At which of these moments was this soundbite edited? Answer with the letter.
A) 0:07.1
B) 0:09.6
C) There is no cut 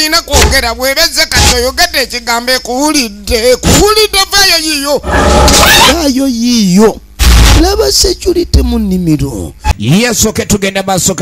B